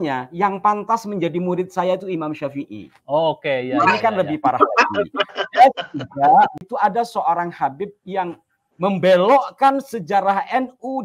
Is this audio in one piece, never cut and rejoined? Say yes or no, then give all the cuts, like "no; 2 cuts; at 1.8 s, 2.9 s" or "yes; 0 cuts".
no; 1 cut; at 6.6 s